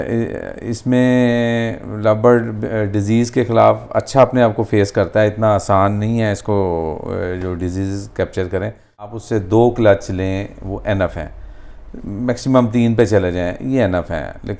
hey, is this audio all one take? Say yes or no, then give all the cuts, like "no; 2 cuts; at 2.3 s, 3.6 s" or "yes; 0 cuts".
no; 1 cut; at 9.2 s